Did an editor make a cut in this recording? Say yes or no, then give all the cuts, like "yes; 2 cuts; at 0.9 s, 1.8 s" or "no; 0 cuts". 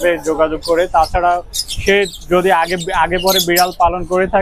no; 0 cuts